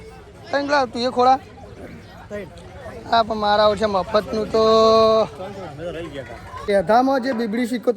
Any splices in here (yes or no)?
yes